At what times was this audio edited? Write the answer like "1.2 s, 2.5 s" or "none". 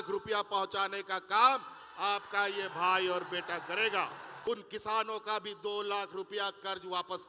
4.4 s